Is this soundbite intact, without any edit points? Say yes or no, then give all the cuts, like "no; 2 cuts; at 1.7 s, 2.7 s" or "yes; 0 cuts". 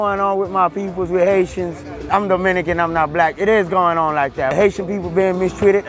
no; 2 cuts; at 2.0 s, 4.5 s